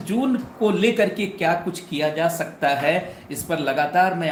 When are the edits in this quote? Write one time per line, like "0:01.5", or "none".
none